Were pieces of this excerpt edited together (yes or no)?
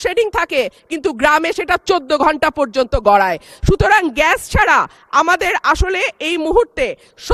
no